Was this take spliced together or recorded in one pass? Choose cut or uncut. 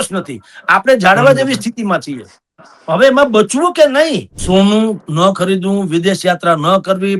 cut